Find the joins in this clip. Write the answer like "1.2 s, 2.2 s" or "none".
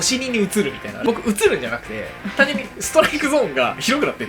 1.0 s